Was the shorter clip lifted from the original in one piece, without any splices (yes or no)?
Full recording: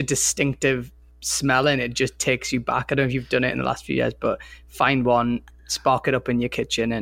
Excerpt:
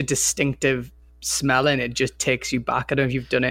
yes